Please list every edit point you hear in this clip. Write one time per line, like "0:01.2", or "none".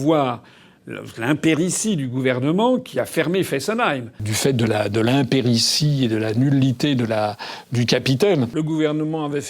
0:04.3
0:08.5